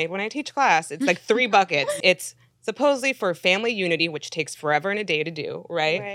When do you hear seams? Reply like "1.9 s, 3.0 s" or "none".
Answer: 2.0 s